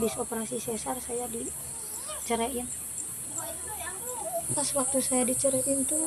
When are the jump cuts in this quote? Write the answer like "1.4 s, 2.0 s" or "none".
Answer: 4.5 s